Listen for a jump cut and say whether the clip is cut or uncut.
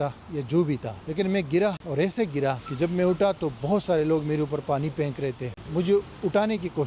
cut